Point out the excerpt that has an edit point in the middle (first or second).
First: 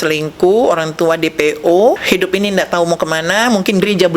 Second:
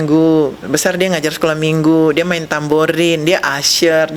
first